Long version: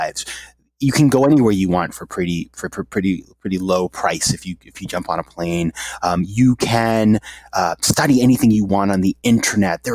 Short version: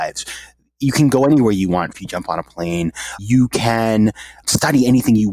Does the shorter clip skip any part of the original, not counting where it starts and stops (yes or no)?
yes